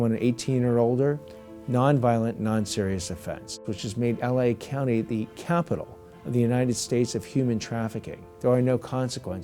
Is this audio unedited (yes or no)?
no